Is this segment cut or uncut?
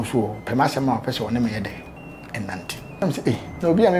cut